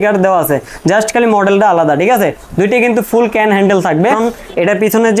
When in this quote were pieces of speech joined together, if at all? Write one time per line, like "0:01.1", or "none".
0:04.2